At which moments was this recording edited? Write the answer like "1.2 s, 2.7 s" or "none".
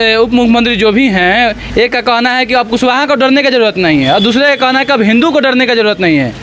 none